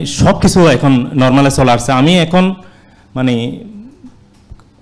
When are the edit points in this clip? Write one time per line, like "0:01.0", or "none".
none